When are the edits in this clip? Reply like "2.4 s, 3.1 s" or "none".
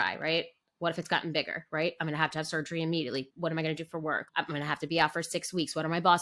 3.3 s, 4.2 s